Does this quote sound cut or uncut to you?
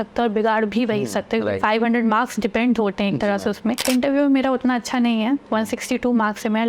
cut